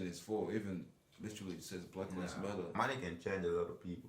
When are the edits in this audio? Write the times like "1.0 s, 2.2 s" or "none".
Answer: 2.8 s